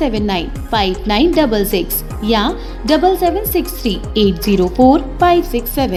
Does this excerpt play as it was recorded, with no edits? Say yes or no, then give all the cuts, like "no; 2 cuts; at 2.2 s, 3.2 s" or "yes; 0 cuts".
yes; 0 cuts